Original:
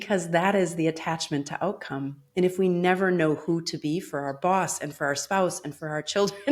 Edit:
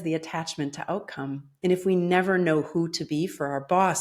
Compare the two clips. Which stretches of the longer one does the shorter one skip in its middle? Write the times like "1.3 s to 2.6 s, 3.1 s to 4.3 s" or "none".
none